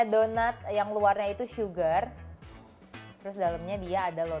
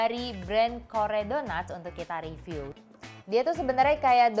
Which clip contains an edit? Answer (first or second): second